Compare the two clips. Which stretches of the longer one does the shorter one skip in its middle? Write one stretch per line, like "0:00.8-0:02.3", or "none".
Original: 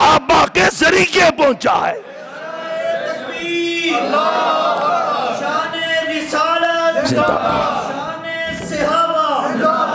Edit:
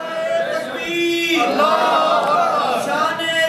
none